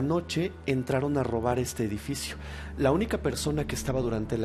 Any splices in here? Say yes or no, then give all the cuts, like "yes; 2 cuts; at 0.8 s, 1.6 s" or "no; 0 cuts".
no; 0 cuts